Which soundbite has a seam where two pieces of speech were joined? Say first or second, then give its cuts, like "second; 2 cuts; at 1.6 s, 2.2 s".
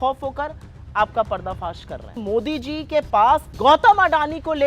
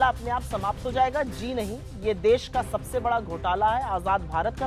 first; 2 cuts; at 2.1 s, 3.5 s